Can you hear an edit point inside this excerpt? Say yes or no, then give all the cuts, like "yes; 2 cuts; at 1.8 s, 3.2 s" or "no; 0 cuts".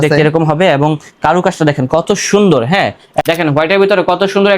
yes; 1 cut; at 3.2 s